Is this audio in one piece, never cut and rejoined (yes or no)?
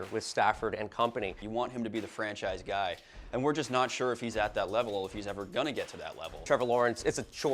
no